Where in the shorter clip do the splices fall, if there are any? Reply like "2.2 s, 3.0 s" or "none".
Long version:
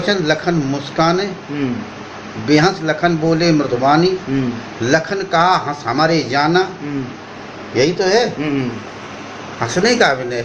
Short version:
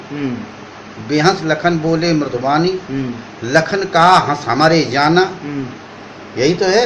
none